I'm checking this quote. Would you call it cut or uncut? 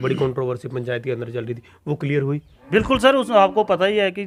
uncut